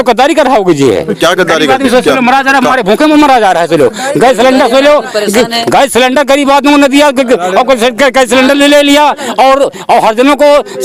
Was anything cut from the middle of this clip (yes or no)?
no